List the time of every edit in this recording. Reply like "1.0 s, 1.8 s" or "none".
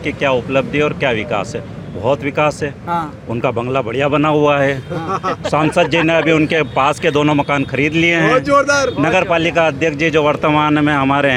none